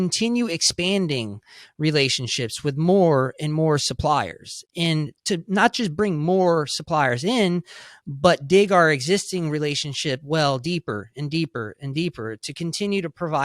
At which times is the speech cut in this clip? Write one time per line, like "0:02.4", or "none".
0:05.1